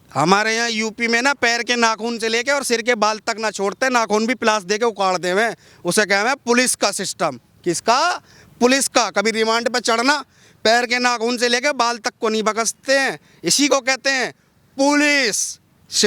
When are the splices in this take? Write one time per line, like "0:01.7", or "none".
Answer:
none